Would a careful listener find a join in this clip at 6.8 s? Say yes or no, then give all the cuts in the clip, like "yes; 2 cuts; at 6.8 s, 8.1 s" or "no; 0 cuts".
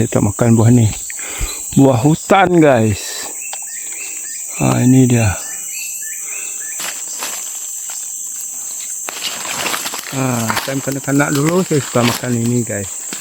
yes; 1 cut; at 6.8 s